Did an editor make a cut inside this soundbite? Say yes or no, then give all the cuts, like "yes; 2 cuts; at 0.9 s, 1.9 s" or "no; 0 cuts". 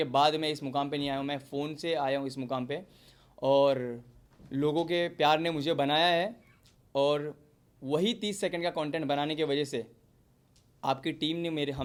no; 0 cuts